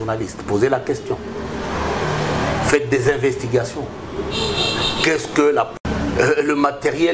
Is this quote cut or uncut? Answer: uncut